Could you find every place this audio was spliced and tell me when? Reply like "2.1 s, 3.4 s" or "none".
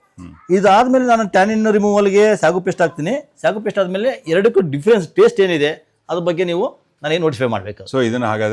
none